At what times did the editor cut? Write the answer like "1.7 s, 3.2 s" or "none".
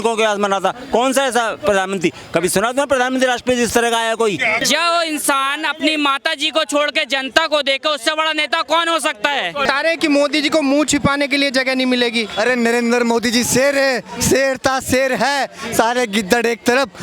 4.6 s, 9.6 s